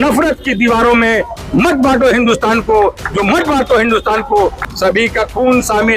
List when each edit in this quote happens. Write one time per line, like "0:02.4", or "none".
0:04.6